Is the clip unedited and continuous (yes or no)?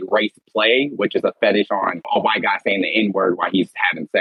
no